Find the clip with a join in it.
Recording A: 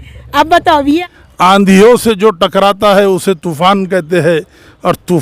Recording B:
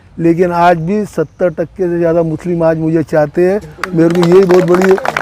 A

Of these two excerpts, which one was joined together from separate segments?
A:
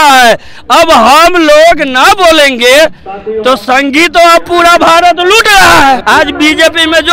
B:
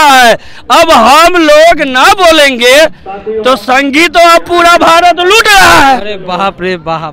A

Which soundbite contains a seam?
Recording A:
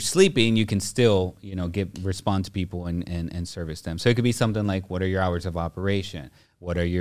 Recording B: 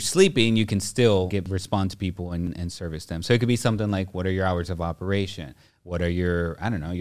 B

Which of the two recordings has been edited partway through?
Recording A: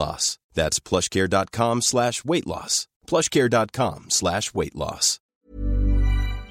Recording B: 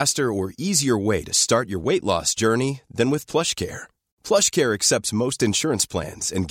A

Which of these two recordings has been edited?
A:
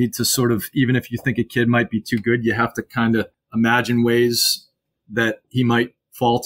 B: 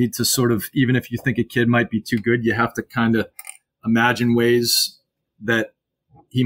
A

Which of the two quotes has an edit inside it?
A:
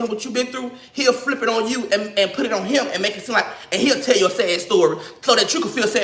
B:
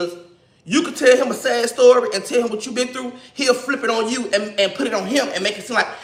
A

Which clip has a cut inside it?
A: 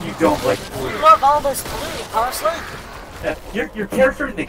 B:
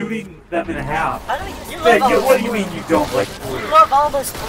B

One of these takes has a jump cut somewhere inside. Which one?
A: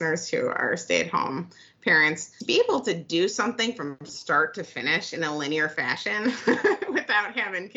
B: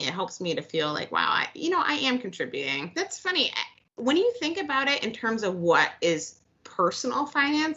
B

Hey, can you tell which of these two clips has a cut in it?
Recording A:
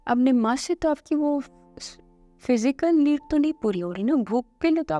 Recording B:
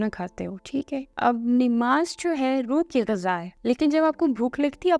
B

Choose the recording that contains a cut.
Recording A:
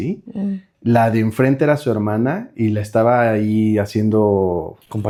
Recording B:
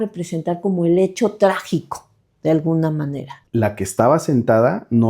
B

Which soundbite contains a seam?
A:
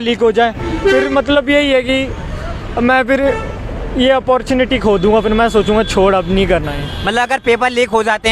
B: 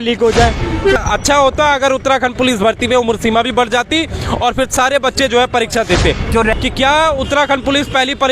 B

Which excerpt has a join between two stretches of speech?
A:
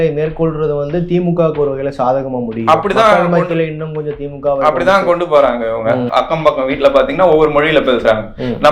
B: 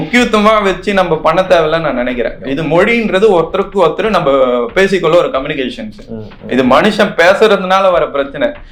A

